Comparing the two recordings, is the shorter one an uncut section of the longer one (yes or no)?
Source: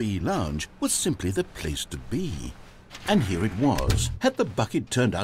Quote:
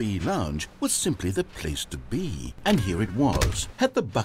no